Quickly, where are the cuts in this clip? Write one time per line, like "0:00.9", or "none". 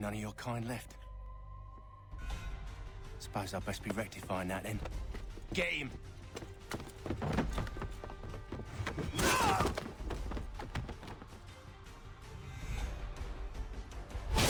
none